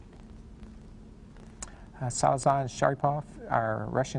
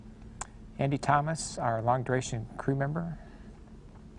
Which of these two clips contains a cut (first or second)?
second